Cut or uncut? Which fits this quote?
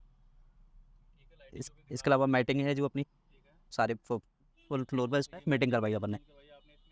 cut